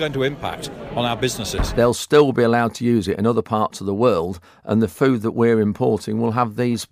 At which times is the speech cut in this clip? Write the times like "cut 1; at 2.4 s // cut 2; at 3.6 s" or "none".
cut 1; at 1.6 s